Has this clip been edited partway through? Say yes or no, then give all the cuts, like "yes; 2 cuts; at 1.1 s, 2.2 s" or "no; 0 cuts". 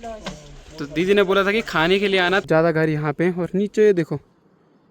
yes; 1 cut; at 2.4 s